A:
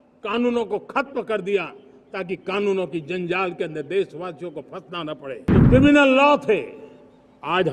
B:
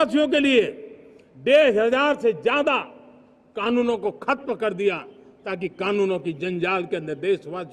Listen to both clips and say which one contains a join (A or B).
A